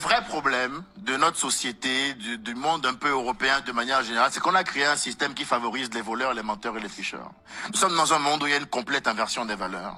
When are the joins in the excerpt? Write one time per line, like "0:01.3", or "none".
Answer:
none